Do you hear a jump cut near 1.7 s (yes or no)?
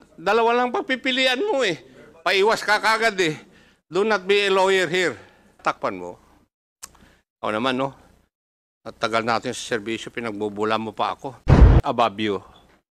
no